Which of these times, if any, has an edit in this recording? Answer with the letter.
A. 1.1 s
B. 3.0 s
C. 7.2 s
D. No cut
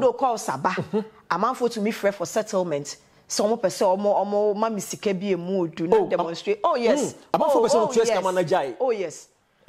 D